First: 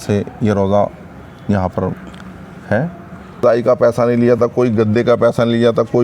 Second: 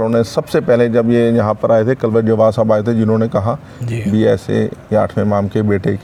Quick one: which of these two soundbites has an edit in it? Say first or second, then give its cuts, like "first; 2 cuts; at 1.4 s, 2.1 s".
first; 1 cut; at 3.4 s